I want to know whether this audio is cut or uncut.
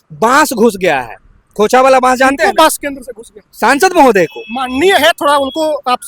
uncut